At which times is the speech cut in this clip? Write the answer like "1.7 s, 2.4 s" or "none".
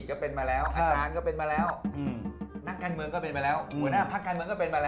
none